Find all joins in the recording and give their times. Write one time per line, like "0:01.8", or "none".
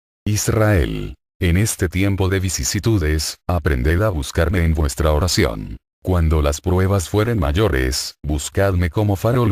0:03.0